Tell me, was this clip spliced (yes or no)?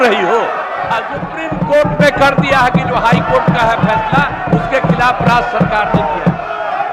yes